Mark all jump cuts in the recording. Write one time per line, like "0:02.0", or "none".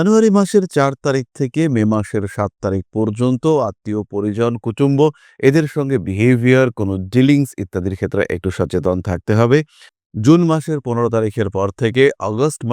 0:09.8

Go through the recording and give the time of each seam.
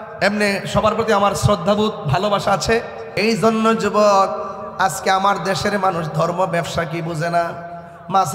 0:03.0

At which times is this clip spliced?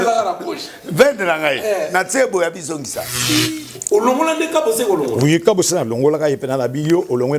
0:03.5

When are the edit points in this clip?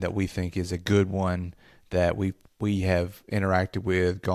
none

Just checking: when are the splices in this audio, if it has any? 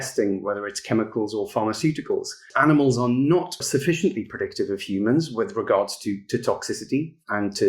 0:02.5
0:03.6

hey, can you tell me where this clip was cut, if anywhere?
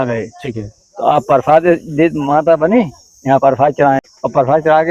0:04.0

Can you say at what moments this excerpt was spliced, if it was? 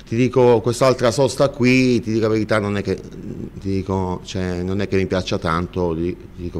0:03.1

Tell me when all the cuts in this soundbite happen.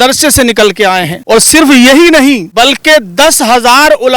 0:01.1
0:02.5

